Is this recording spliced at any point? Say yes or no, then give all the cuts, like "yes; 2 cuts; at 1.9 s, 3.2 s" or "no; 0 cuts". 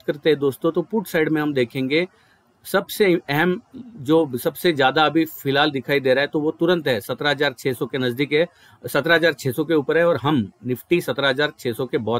no; 0 cuts